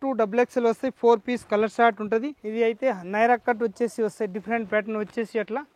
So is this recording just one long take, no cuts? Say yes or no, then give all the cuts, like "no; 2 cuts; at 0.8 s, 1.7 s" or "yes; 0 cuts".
no; 1 cut; at 2.4 s